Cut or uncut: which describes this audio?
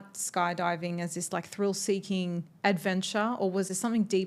uncut